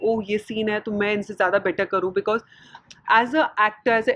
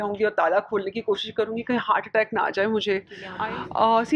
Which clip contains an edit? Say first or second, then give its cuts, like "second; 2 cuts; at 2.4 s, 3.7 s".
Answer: second; 1 cut; at 3.2 s